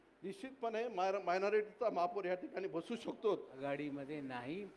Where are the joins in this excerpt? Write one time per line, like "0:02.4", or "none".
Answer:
0:03.5